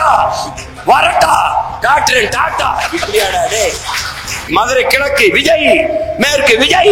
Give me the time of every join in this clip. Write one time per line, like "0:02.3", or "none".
0:04.5